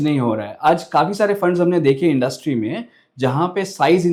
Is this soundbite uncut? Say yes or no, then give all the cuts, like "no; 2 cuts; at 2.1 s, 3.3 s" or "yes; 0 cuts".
yes; 0 cuts